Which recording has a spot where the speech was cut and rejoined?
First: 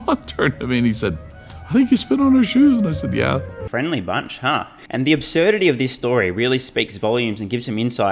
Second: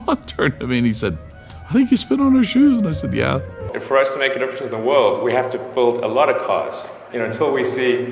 second; 1 cut; at 3.6 s

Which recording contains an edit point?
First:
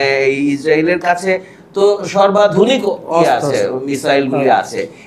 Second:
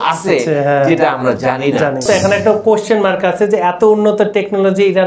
second; 1 cut; at 2.0 s

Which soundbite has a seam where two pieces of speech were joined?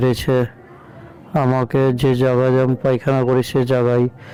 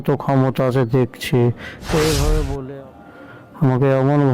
second; 1 cut; at 2.6 s

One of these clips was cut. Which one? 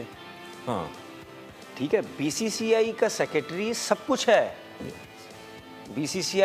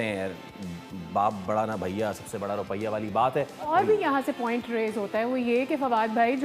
second; 1 cut; at 3.7 s

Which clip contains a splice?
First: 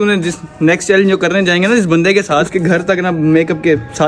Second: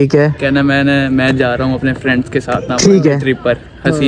first; 1 cut; at 2.4 s

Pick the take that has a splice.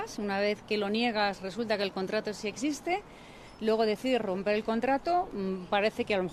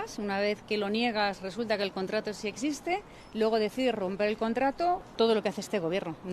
second; 2 cuts; at 3.2 s, 5.1 s

